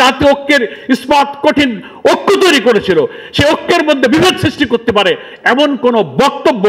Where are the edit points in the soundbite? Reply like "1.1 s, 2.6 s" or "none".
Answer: none